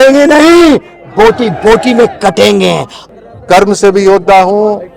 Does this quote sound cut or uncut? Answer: cut